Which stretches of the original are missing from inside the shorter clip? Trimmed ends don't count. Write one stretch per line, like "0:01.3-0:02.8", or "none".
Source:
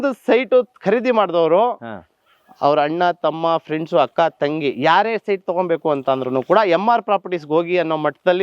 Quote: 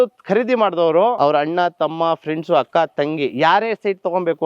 0:01.7-0:02.6